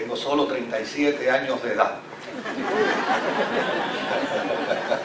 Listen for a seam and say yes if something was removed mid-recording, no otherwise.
no